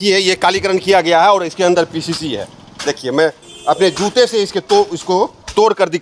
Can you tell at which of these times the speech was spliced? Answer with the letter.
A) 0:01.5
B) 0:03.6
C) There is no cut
C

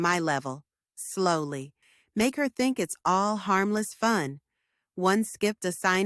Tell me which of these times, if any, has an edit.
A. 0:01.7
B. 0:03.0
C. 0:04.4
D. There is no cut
A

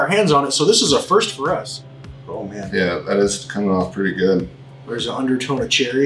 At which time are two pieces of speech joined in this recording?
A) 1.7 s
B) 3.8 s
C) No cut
A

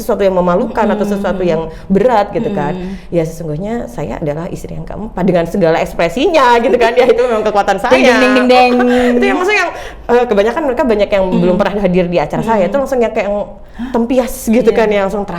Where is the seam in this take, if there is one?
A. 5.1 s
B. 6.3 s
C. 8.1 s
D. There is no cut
D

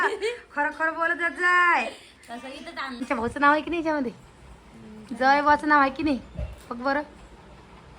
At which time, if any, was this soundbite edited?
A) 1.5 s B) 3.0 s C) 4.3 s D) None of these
B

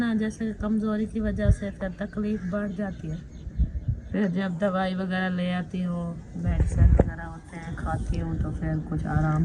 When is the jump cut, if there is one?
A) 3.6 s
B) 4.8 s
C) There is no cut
C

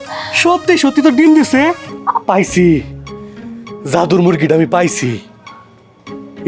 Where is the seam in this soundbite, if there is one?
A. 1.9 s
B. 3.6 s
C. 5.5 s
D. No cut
A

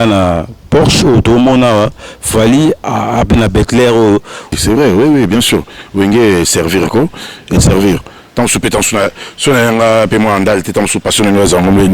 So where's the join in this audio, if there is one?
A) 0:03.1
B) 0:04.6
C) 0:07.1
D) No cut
B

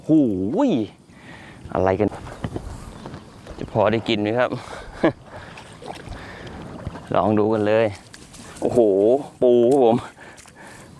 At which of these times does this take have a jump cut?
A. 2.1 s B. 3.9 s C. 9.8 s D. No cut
A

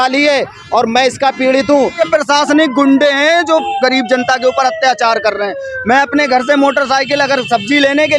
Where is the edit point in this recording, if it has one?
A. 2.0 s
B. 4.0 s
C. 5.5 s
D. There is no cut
A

